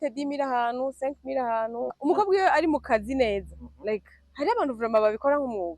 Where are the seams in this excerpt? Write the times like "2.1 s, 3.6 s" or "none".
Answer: 2.0 s